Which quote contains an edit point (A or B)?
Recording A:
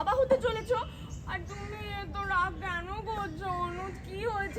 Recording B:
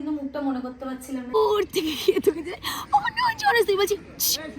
B